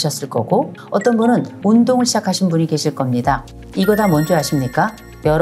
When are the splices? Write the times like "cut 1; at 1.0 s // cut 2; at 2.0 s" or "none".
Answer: cut 1; at 1.5 s // cut 2; at 3.6 s